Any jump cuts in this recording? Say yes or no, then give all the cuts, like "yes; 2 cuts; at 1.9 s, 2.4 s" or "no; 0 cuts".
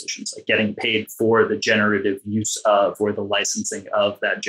no; 0 cuts